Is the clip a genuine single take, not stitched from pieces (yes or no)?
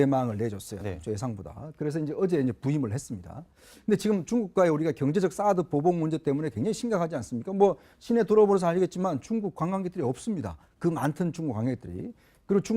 no